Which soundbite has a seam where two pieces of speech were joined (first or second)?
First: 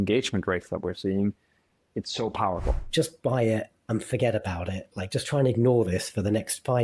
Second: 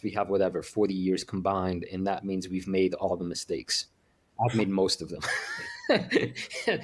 first